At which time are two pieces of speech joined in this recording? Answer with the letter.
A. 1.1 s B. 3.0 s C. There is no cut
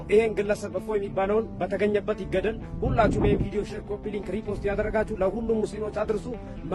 C